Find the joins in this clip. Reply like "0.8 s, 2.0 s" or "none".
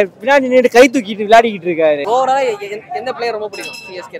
2.0 s